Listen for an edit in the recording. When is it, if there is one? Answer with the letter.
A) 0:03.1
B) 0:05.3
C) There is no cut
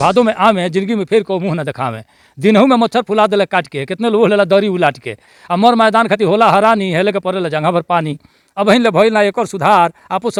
C